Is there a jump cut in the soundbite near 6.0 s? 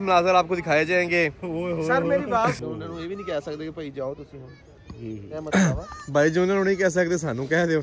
no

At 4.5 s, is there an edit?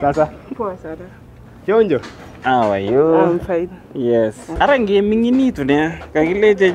yes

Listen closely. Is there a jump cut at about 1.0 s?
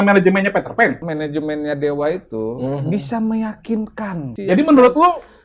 yes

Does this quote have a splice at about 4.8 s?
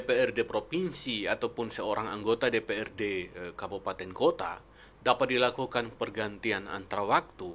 no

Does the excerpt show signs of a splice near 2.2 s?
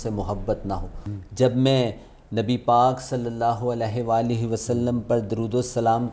no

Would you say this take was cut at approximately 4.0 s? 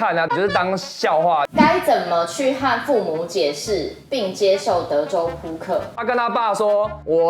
no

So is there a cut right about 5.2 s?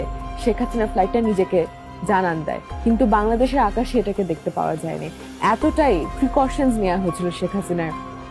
no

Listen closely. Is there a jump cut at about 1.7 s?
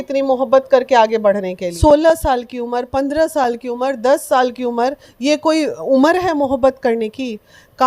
yes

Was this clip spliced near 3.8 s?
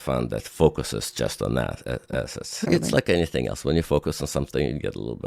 no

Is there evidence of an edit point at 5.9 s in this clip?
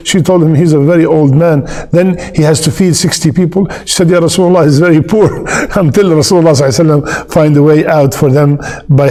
no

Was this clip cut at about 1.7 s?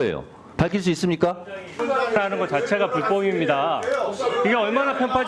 yes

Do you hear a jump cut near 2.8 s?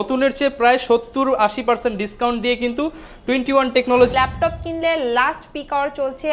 no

